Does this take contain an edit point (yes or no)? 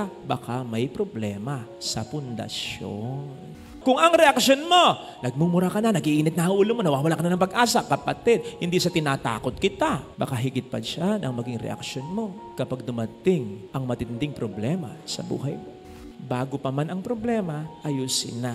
yes